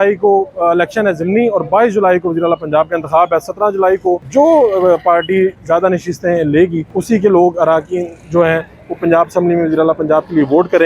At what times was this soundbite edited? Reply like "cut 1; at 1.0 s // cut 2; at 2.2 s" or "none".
cut 1; at 4.2 s // cut 2; at 6.9 s